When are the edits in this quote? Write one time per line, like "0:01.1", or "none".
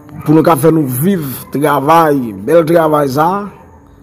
none

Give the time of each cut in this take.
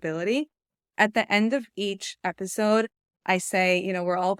none

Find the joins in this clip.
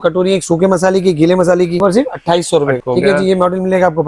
0:01.8
0:02.8

